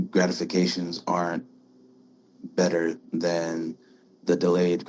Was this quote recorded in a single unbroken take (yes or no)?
yes